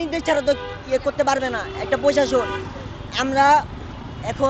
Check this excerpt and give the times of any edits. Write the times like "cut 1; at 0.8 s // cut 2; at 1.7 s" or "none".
none

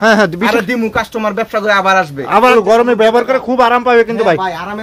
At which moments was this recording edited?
cut 1; at 2.5 s

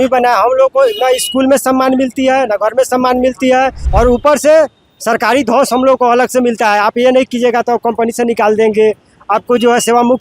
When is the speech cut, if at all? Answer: cut 1; at 3.8 s

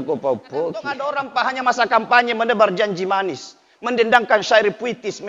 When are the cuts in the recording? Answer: cut 1; at 1.2 s

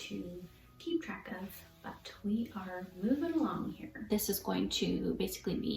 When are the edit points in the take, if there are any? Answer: cut 1; at 3.9 s

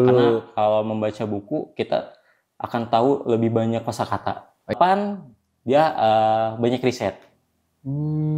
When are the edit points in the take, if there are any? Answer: cut 1; at 4.7 s

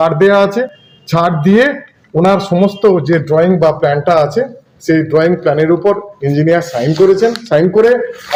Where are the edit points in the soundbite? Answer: none

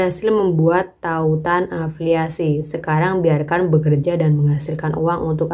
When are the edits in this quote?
none

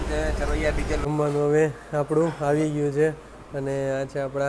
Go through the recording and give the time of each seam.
cut 1; at 1.0 s

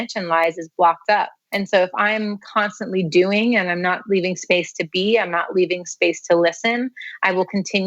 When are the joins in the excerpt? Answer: cut 1; at 1.4 s

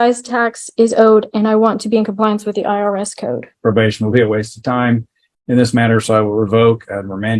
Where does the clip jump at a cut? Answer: cut 1; at 3.5 s

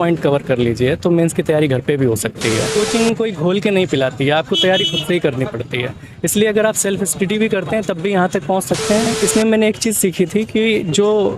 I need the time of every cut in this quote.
cut 1; at 2.7 s // cut 2; at 9.1 s

